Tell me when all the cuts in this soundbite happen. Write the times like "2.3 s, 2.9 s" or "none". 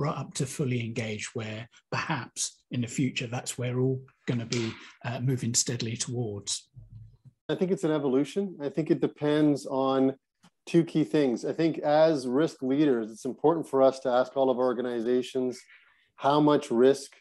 7.5 s